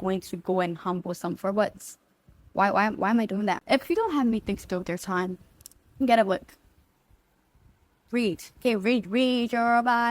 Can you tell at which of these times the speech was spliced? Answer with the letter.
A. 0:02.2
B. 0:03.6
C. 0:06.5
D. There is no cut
B